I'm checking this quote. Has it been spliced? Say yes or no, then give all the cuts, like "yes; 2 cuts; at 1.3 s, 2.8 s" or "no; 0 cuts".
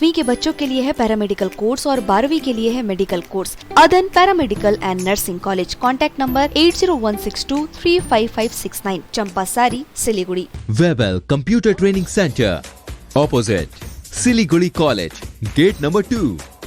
yes; 2 cuts; at 3.6 s, 10.6 s